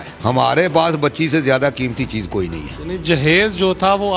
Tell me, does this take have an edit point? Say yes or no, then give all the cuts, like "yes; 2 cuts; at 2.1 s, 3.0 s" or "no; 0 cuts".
no; 0 cuts